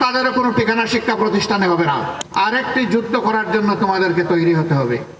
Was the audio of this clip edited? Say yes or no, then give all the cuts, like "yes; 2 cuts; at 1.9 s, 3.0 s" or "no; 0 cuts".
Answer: yes; 1 cut; at 2.2 s